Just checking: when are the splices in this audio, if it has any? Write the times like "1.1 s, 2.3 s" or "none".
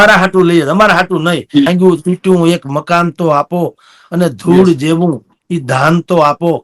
1.7 s